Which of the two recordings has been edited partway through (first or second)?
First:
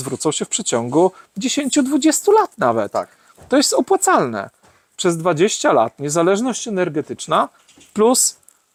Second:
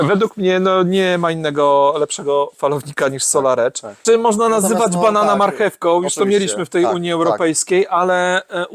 second